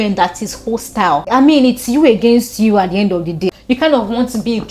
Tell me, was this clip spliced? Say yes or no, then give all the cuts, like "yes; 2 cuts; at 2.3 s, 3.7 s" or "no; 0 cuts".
yes; 2 cuts; at 1.2 s, 3.5 s